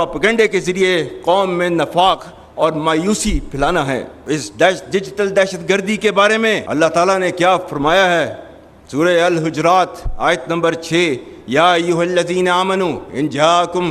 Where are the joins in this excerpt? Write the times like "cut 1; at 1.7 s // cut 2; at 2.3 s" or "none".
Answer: cut 1; at 4.1 s // cut 2; at 6.6 s